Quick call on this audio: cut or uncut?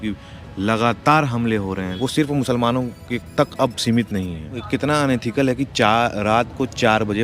cut